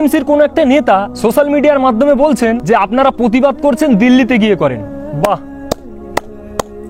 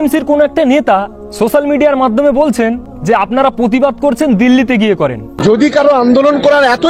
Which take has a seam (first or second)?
first